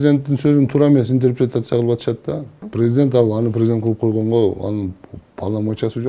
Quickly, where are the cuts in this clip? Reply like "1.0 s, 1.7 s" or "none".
2.6 s